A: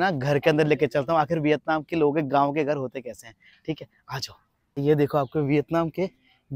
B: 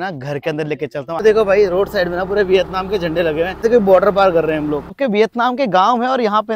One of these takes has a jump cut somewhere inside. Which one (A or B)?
B